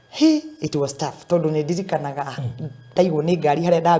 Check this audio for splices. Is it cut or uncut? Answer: cut